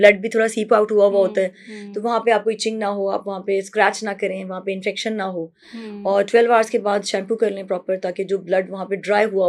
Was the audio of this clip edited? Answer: no; 0 cuts

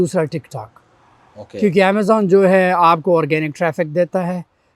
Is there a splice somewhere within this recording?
no; 0 cuts

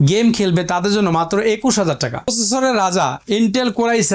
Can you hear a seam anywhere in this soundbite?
yes; 1 cut; at 2.3 s

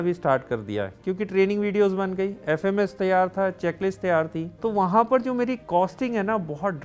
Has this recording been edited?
yes; 2 cuts; at 4.4 s, 5.6 s

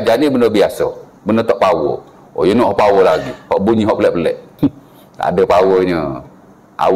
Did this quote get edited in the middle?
yes; 1 cut; at 4.5 s

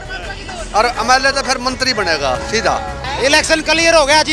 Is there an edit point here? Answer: yes; 1 cut; at 3.0 s

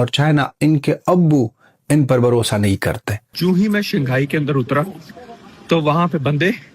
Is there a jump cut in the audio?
yes; 1 cut; at 3.3 s

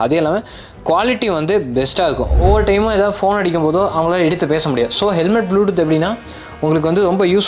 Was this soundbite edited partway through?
yes; 1 cut; at 2.3 s

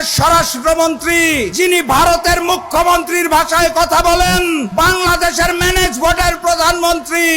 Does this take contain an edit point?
yes; 2 cuts; at 1.5 s, 4.7 s

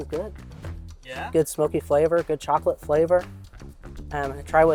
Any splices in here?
no; 0 cuts

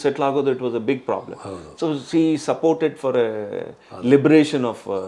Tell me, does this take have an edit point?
no; 0 cuts

